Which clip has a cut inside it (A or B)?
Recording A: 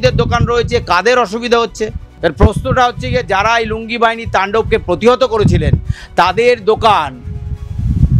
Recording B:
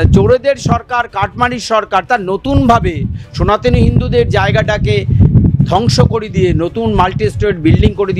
A